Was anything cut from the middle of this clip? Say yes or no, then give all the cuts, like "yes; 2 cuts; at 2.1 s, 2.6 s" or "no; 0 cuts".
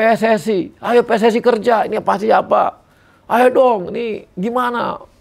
no; 0 cuts